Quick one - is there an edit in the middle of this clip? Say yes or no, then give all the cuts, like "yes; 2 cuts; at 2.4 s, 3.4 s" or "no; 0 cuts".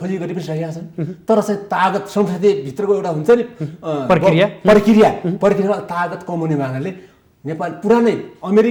no; 0 cuts